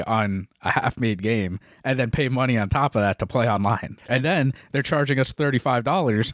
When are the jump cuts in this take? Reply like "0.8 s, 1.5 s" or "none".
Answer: 3.9 s